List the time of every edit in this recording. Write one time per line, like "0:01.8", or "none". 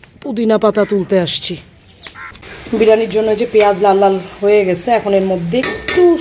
0:02.3